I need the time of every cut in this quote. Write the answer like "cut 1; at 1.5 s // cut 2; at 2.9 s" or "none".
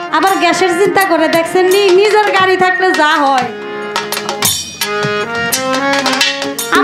none